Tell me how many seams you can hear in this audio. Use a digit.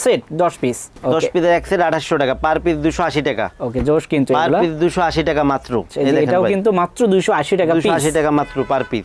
0